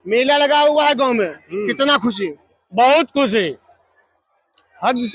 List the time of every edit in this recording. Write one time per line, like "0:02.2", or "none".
none